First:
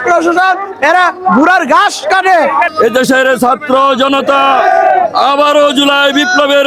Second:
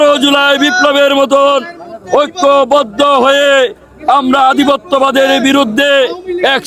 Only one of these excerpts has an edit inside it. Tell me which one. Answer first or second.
first